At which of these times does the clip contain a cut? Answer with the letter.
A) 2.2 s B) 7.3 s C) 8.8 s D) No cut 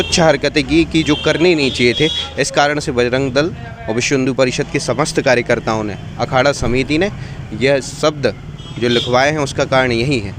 D